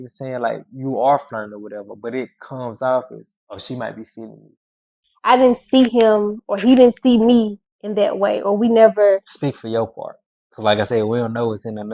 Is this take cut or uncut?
cut